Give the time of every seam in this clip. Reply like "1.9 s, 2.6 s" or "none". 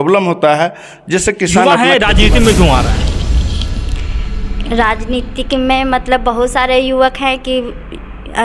1.6 s